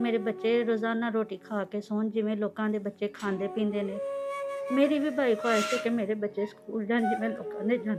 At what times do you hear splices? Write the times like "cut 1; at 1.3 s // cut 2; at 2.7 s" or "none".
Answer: none